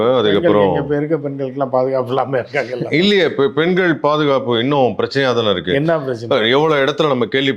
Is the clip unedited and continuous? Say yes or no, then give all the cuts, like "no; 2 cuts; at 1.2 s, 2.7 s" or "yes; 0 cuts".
yes; 0 cuts